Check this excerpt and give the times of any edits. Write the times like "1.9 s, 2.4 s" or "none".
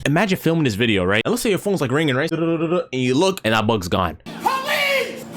1.2 s, 2.3 s